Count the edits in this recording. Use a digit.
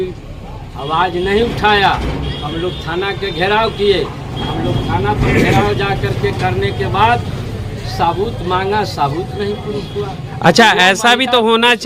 0